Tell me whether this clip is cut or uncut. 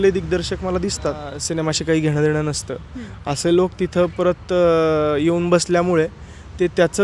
cut